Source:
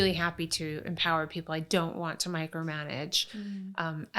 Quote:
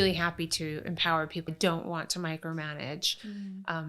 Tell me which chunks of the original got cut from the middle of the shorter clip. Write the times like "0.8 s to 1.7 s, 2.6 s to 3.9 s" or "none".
1.5 s to 1.6 s